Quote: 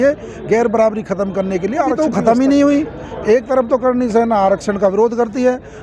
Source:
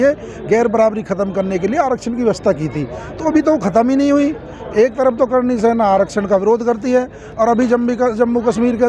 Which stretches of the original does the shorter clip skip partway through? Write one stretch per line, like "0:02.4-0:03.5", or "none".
0:02.0-0:03.5

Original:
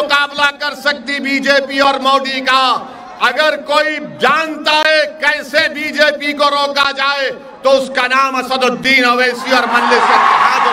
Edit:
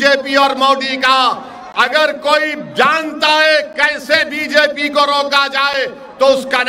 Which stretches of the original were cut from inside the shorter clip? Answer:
none

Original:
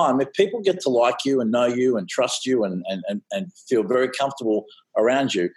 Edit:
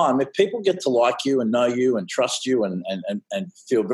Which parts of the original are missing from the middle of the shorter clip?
none

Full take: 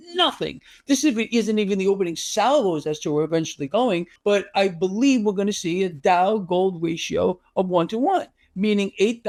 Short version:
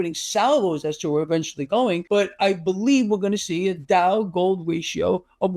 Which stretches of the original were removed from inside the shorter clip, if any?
0:04.0-0:04.2

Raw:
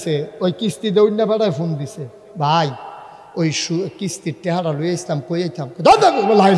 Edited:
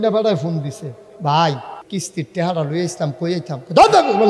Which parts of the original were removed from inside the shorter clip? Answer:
0:03.0-0:03.9

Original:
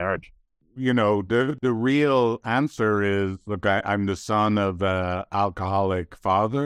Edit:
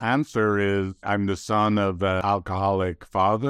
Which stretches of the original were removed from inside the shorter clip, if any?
0:03.5-0:03.8
0:05.0-0:05.3

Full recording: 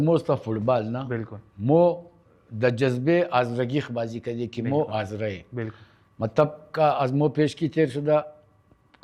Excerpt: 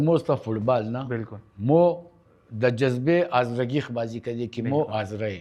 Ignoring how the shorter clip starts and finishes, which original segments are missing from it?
none

